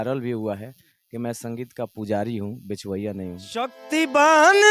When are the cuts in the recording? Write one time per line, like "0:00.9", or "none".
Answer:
0:03.8